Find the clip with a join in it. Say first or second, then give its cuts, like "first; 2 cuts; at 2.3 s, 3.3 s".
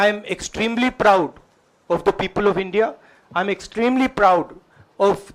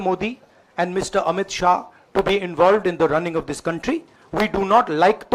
second; 1 cut; at 4.2 s